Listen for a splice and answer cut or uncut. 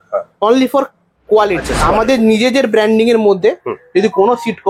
cut